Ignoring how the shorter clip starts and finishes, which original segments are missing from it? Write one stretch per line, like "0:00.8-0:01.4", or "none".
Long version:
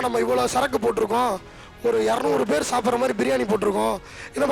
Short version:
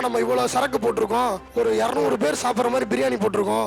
0:01.4-0:01.7